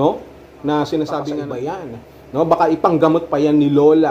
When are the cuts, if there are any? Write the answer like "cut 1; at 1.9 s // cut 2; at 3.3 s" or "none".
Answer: cut 1; at 1.5 s